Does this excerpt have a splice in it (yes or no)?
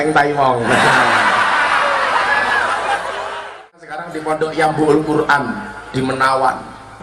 yes